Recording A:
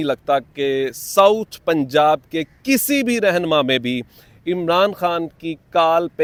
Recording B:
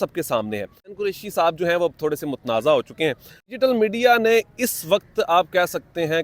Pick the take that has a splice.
B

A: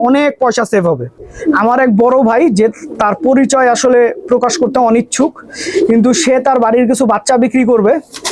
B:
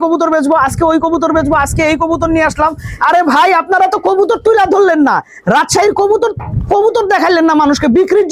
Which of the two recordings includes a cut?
A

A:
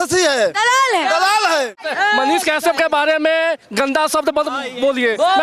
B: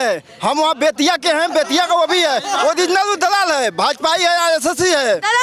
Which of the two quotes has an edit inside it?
A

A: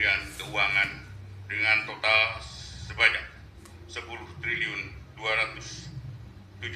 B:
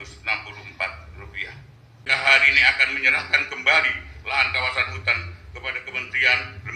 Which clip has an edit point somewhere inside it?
B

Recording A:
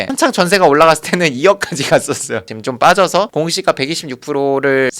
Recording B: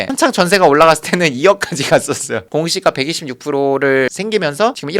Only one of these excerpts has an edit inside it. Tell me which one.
B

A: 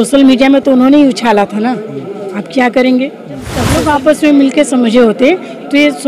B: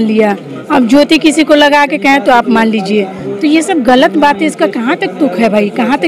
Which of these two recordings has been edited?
A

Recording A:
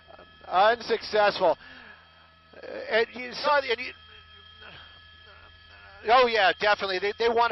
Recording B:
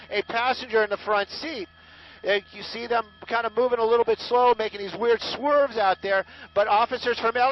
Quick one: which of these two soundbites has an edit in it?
A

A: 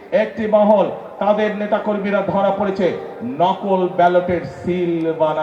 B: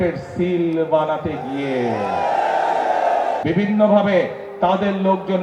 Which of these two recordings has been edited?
B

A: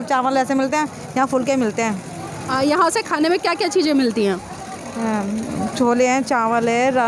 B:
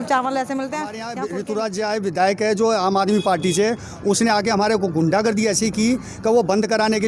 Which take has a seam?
B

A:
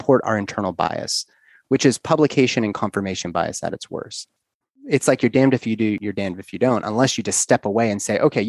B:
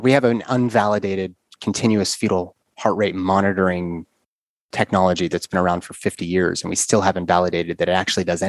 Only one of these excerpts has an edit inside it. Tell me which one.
A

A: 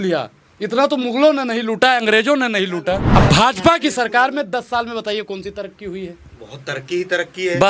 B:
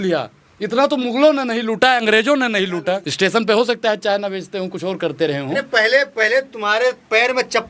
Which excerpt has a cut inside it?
A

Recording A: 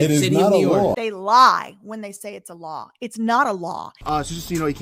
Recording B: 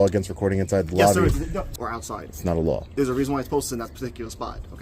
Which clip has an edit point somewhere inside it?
B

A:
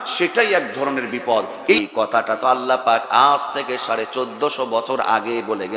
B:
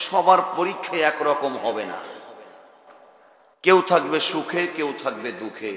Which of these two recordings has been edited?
A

